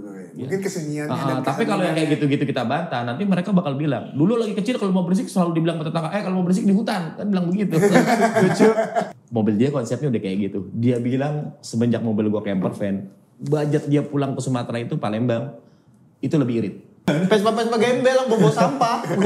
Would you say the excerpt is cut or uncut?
cut